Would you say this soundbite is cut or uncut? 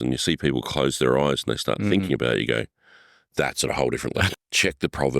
cut